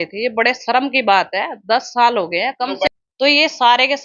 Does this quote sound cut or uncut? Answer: cut